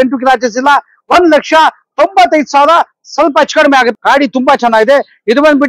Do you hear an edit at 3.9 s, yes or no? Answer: yes